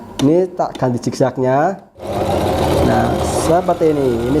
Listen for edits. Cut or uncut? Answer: cut